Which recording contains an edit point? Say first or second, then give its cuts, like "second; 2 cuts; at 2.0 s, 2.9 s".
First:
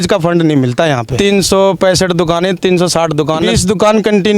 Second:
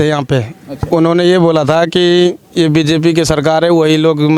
first; 2 cuts; at 1.1 s, 3.5 s